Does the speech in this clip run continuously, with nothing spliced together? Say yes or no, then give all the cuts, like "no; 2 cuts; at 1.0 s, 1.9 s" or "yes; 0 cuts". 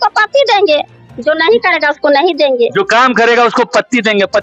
yes; 0 cuts